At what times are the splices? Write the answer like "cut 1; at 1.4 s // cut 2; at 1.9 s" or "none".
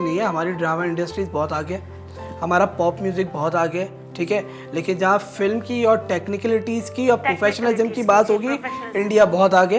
none

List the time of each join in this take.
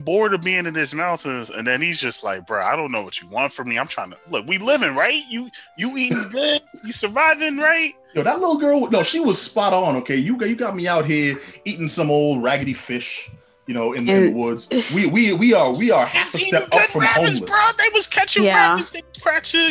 none

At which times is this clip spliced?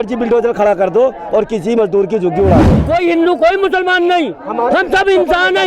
cut 1; at 2.8 s

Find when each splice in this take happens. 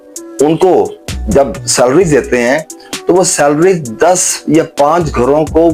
none

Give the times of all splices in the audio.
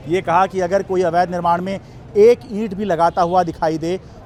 none

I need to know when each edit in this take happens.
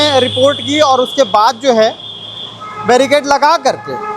none

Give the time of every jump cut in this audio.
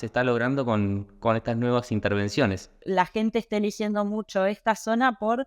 cut 1; at 2.8 s

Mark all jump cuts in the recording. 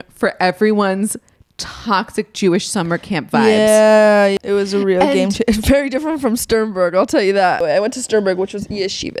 cut 1; at 4.4 s // cut 2; at 7.6 s

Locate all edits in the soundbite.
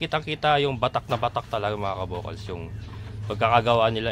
none

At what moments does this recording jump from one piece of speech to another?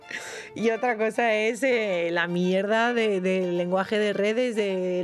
none

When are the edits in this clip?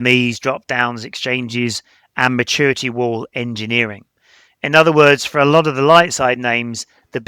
none

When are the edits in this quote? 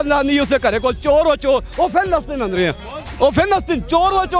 none

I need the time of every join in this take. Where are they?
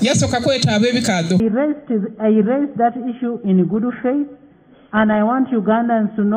cut 1; at 1.4 s

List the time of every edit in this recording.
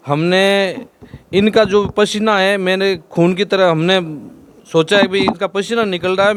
none

